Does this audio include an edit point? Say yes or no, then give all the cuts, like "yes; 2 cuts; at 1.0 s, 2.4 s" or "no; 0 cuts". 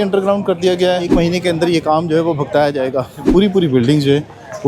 yes; 2 cuts; at 1.1 s, 3.2 s